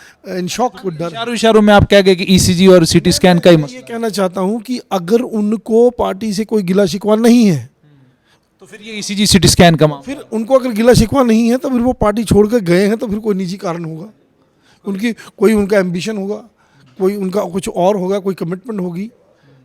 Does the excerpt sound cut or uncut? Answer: cut